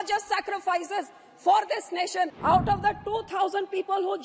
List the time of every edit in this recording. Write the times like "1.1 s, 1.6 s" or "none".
2.3 s